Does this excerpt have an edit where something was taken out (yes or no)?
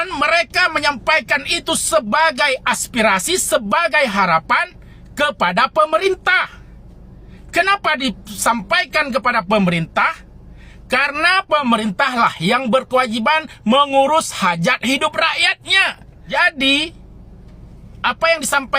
yes